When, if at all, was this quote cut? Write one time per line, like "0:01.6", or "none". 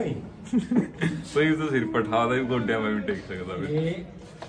none